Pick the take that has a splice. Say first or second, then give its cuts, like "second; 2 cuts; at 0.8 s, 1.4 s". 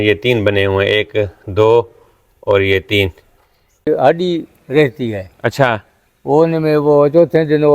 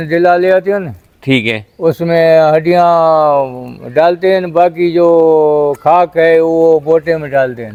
first; 1 cut; at 3.9 s